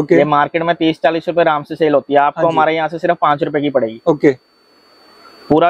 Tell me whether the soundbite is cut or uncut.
uncut